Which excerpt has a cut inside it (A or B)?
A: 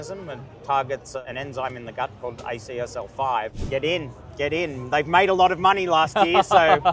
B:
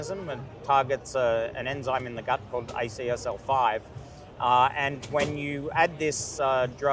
A